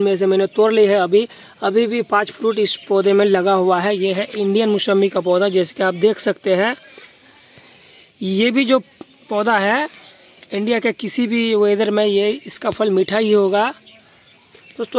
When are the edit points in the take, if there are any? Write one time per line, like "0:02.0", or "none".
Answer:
none